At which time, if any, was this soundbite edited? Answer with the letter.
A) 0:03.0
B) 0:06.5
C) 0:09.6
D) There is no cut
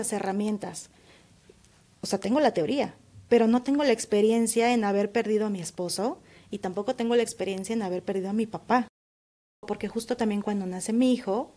C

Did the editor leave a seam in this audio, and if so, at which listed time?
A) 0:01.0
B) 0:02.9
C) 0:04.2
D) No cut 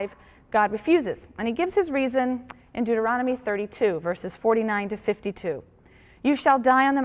C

